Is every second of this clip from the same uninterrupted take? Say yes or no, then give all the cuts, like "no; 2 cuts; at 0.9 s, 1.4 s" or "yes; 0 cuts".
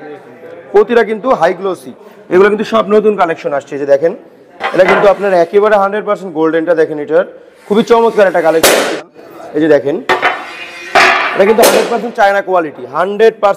no; 2 cuts; at 2.1 s, 9.1 s